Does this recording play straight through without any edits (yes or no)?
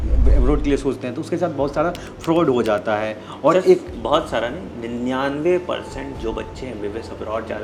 yes